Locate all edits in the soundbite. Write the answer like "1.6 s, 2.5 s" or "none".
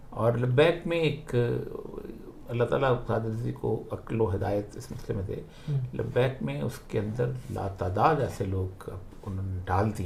none